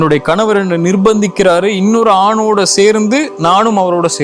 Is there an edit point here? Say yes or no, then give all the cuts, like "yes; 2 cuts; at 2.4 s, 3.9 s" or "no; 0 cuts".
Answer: no; 0 cuts